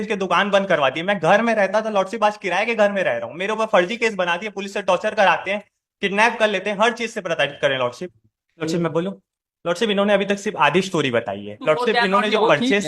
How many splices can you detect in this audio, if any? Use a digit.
2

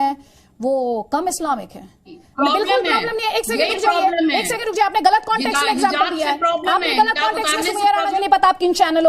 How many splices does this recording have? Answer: 2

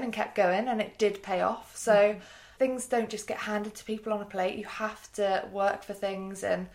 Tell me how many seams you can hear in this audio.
1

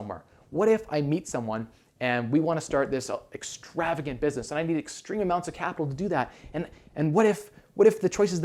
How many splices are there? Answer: 0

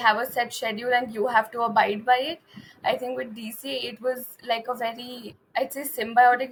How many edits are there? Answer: 0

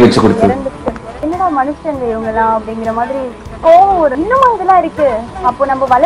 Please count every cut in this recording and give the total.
2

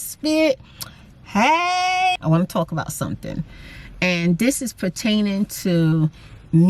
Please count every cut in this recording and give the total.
1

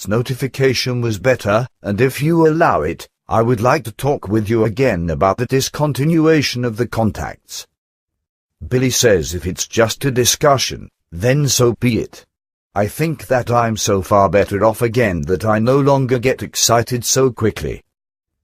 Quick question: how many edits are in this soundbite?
1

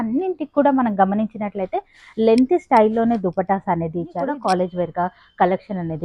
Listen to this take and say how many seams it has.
1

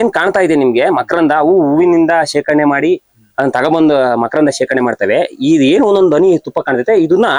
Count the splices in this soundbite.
0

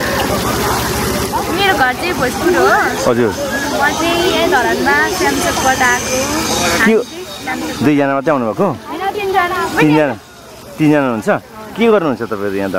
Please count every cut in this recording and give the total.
0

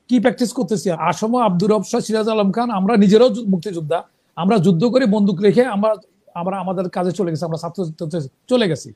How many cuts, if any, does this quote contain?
1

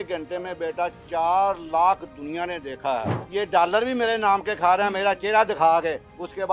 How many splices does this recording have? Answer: 1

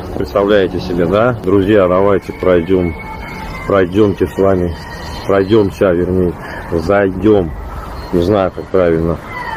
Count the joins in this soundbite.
1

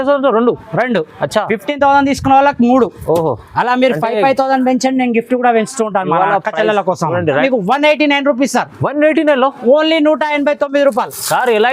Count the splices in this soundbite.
1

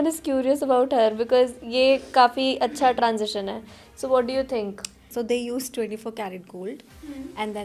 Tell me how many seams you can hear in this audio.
1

